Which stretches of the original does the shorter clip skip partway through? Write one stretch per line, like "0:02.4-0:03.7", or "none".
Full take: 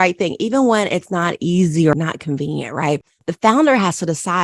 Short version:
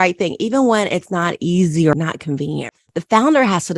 0:02.7-0:03.0